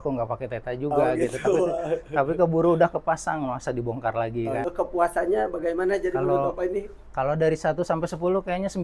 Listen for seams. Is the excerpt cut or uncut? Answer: cut